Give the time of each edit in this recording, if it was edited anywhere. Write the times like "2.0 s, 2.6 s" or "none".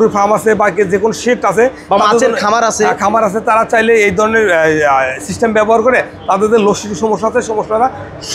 none